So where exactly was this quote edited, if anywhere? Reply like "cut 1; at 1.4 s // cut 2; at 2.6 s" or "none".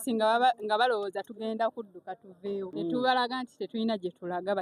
cut 1; at 2.7 s